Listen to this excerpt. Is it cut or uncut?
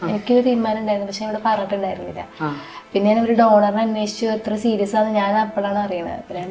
uncut